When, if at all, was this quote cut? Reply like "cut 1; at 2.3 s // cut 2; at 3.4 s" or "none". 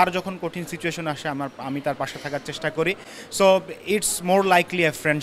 none